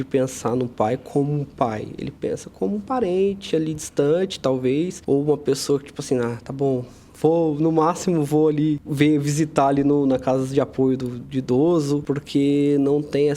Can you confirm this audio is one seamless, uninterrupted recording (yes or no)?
no